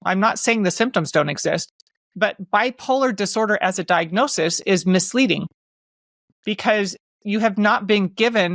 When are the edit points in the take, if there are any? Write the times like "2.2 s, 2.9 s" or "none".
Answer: none